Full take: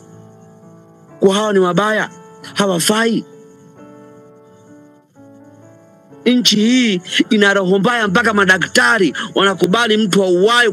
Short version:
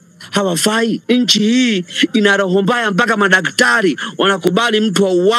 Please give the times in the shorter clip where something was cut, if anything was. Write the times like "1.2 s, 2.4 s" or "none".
1.0 s